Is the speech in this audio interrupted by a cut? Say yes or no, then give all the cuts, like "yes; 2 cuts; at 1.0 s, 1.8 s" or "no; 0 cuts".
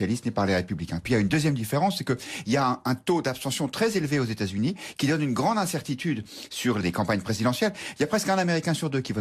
no; 0 cuts